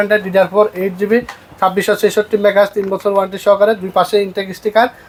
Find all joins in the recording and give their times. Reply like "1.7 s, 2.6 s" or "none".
none